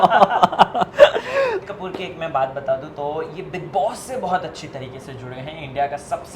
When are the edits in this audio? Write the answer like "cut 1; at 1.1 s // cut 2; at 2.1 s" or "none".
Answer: cut 1; at 1.6 s